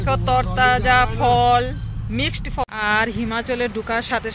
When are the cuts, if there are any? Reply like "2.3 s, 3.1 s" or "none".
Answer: 2.6 s